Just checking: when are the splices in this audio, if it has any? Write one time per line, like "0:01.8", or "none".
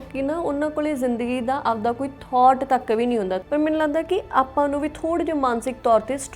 0:03.4